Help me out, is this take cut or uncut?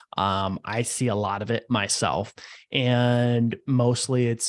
uncut